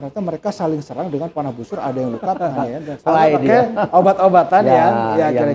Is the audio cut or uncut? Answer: cut